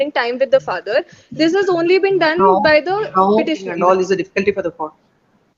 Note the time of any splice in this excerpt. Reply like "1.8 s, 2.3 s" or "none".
3.7 s